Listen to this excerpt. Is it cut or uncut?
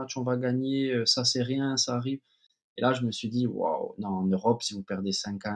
uncut